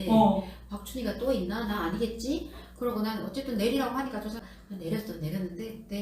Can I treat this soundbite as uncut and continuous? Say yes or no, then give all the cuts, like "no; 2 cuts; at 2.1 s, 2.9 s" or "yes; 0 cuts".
no; 1 cut; at 4.4 s